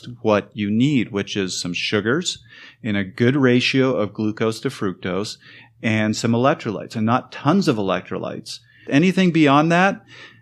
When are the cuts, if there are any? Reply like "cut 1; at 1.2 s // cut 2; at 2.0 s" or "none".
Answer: cut 1; at 8.8 s